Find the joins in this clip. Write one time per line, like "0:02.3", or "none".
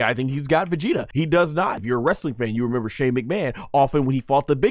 0:01.1
0:01.8